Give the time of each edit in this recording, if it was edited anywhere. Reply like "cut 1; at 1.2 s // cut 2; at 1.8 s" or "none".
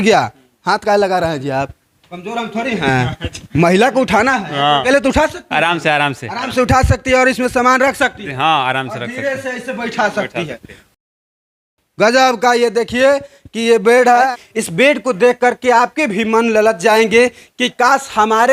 none